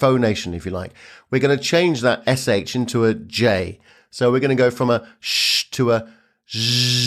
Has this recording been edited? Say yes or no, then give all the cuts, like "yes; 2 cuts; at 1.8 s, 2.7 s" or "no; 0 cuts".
no; 0 cuts